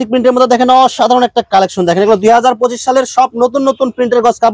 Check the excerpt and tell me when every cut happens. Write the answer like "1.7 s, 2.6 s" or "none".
none